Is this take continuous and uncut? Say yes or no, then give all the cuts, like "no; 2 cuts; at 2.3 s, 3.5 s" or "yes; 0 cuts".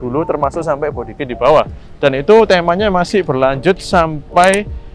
yes; 0 cuts